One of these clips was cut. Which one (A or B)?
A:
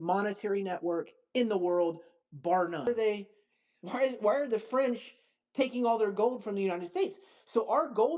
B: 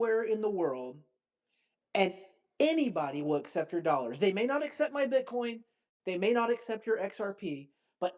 A